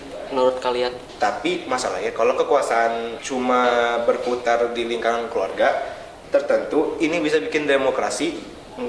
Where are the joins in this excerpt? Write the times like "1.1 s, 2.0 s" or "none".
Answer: 1.0 s, 3.2 s